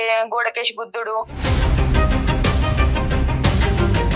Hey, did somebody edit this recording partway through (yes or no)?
no